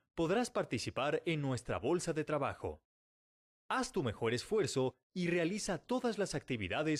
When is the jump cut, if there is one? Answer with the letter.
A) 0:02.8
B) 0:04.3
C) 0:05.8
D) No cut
D